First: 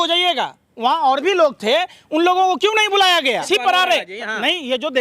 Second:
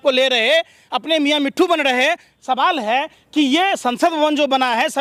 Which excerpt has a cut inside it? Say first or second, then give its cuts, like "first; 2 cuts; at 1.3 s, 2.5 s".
first; 1 cut; at 3.4 s